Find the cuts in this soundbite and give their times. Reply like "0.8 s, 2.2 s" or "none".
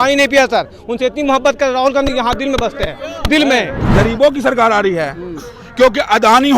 3.8 s